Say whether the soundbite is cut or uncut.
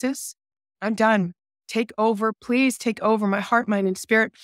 cut